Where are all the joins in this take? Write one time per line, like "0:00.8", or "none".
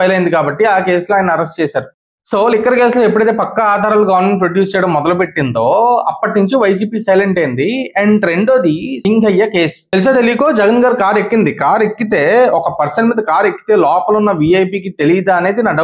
0:08.9
0:09.8